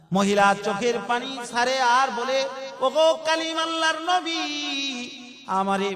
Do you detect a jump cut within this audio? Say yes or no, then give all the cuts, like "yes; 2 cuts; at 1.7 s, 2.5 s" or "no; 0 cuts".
no; 0 cuts